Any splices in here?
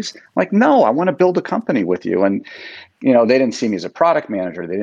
no; 0 cuts

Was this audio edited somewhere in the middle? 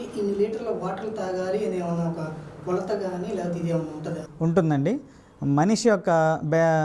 no; 0 cuts

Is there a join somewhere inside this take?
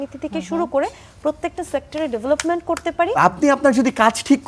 yes; 1 cut; at 3.1 s

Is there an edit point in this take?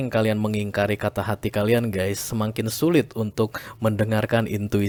no; 0 cuts

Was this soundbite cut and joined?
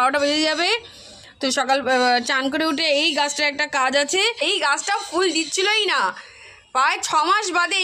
yes; 1 cut; at 4.4 s

